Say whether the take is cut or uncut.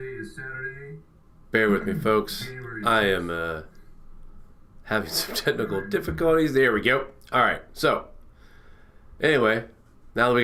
uncut